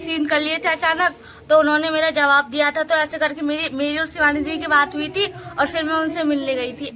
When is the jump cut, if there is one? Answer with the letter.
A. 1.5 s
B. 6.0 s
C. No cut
C